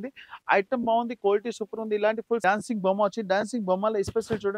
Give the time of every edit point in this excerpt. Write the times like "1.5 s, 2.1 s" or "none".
2.4 s